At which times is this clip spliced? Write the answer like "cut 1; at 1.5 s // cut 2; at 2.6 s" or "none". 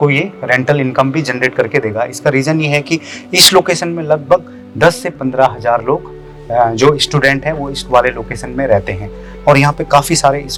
none